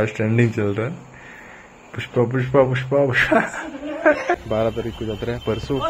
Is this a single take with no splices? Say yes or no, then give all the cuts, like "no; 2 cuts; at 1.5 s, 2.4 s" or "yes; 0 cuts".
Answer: no; 1 cut; at 4.2 s